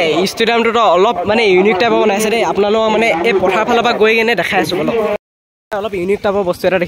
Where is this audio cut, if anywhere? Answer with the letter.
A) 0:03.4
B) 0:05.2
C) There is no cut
B